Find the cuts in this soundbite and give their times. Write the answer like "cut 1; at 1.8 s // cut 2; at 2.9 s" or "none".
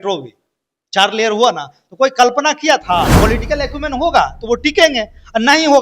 cut 1; at 3.1 s